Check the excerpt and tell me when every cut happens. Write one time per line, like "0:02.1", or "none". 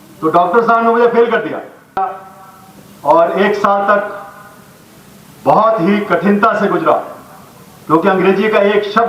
0:02.1